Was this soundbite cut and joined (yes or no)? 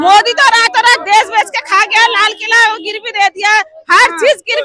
no